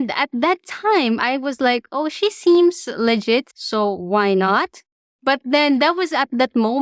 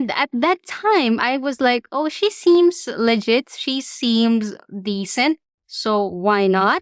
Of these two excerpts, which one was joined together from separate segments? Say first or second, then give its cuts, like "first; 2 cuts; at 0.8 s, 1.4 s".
first; 1 cut; at 3.6 s